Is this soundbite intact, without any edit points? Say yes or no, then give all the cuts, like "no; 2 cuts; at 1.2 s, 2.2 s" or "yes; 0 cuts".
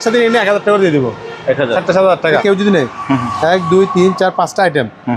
no; 1 cut; at 2.4 s